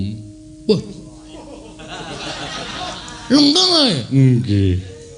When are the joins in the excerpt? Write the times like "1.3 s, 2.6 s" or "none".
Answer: 0.9 s

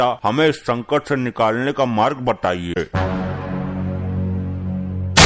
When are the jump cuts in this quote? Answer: 2.8 s

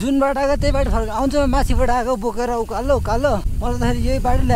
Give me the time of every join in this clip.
3.5 s

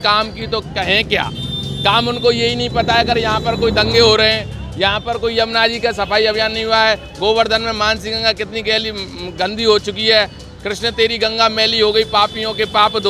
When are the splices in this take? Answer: none

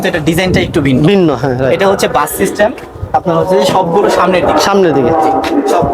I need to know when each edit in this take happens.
none

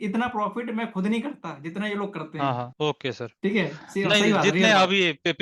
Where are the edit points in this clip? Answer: 2.7 s

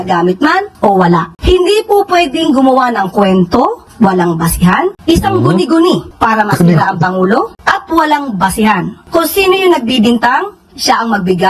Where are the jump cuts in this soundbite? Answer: 9.0 s

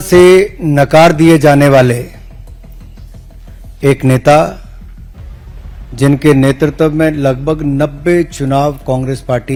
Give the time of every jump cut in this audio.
none

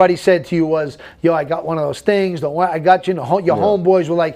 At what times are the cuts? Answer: none

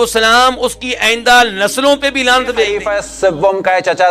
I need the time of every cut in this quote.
2.8 s

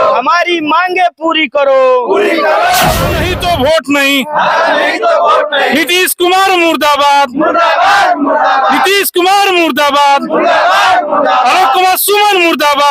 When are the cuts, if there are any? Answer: 3.2 s

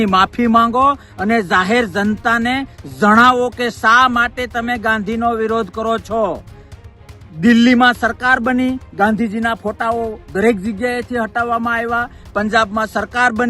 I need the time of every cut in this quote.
none

